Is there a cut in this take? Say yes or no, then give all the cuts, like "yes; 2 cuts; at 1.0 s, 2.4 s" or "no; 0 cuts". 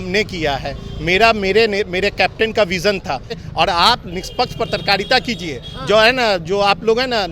yes; 1 cut; at 3.4 s